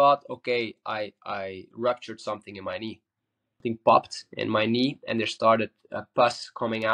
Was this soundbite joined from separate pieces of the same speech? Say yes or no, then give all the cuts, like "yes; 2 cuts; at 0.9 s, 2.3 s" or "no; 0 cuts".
yes; 1 cut; at 3.6 s